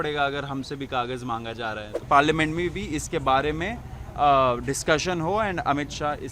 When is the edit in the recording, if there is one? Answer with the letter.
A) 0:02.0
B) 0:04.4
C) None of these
A